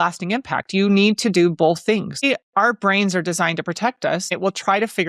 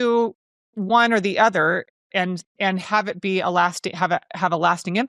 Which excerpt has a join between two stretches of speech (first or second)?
first